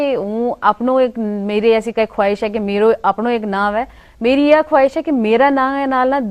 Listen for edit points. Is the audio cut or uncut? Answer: uncut